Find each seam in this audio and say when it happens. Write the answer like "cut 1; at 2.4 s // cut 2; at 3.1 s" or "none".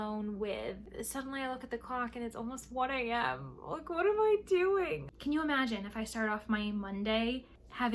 cut 1; at 0.9 s // cut 2; at 5.1 s